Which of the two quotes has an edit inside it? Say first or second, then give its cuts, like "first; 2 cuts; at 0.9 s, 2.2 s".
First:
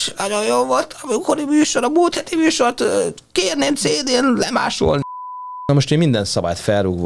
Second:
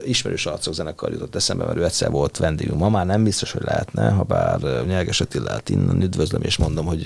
first; 1 cut; at 5.6 s